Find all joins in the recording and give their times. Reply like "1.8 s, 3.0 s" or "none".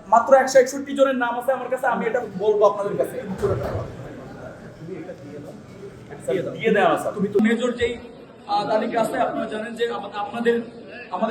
7.4 s